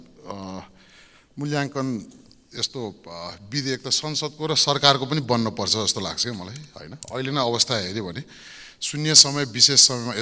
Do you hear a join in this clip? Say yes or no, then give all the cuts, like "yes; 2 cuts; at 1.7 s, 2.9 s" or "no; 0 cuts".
no; 0 cuts